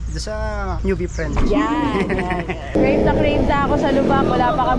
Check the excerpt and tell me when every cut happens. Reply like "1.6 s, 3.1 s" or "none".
2.7 s